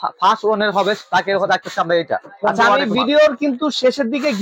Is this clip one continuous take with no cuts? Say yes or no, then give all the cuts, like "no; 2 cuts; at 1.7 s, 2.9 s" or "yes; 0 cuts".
yes; 0 cuts